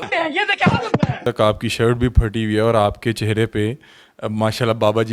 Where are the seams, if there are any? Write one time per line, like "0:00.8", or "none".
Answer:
0:01.2